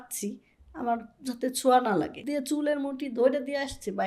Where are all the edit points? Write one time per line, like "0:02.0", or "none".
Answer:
0:02.2